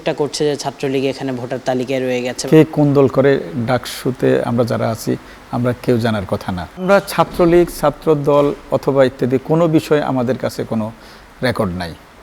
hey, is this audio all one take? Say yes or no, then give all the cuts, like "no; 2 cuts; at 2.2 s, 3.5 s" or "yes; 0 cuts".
no; 2 cuts; at 2.4 s, 6.8 s